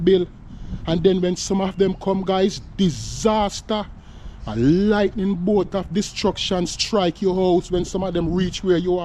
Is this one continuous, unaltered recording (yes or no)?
yes